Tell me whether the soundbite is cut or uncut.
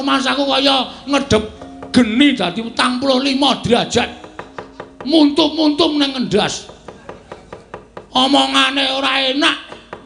uncut